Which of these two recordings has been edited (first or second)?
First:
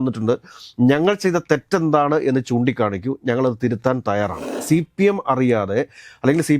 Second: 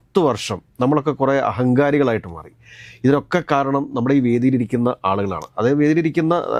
first